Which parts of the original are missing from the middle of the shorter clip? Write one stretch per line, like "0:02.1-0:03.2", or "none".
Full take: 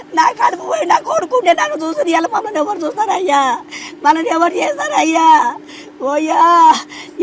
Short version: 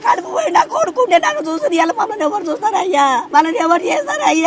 0:03.6-0:04.0